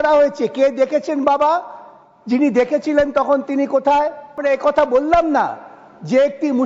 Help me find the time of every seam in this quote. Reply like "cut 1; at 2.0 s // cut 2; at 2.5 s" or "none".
cut 1; at 4.4 s